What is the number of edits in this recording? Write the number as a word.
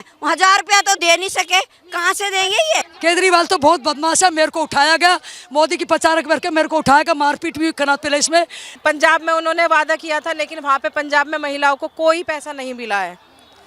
two